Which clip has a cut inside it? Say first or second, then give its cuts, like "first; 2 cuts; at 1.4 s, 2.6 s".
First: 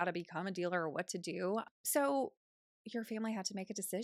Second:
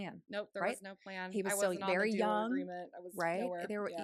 first; 1 cut; at 1.6 s